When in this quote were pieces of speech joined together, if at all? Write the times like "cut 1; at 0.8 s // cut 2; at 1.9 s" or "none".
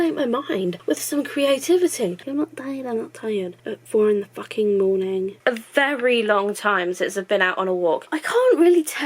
cut 1; at 2.2 s // cut 2; at 5.3 s // cut 3; at 8.1 s